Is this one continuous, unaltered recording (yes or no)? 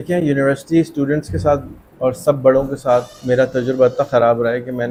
yes